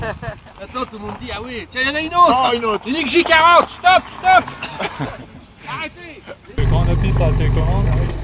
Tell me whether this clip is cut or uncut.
cut